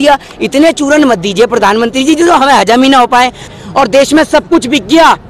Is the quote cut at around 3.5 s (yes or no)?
yes